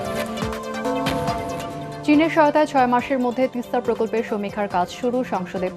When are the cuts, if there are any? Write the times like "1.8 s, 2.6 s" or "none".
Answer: 1.5 s